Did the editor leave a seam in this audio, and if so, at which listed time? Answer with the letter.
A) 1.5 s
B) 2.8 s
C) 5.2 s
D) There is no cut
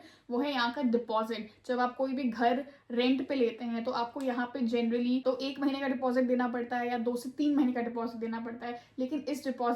C